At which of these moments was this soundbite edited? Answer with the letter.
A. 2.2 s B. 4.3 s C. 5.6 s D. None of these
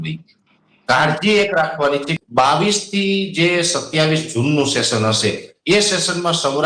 A